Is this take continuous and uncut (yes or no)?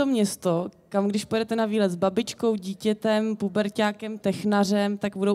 yes